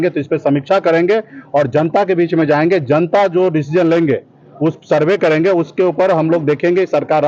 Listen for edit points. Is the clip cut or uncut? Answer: uncut